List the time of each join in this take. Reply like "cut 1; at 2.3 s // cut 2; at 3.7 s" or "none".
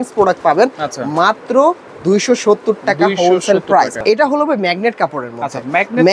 cut 1; at 4.0 s

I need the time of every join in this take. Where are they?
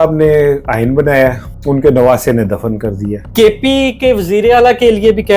cut 1; at 1.5 s // cut 2; at 3.2 s

